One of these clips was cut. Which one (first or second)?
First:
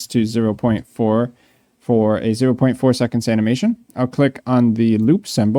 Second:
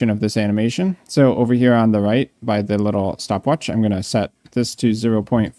second